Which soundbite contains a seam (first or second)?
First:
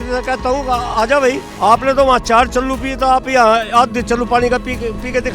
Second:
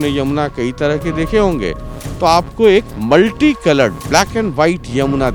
first